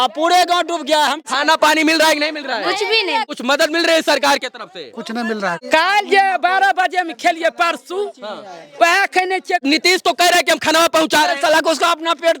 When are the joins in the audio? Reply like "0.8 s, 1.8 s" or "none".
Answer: 1.2 s, 3.3 s, 5.6 s, 9.6 s